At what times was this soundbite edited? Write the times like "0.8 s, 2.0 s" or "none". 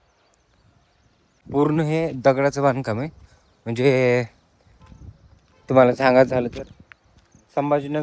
1.4 s